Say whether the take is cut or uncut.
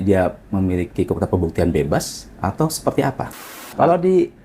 cut